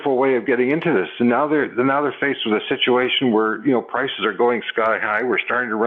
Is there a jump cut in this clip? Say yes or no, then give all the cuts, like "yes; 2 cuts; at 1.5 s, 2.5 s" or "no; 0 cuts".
no; 0 cuts